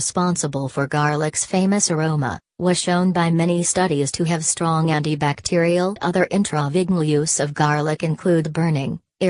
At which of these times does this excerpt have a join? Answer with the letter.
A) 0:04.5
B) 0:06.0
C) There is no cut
C